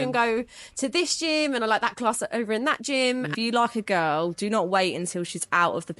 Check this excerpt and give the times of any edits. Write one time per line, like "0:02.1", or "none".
0:03.3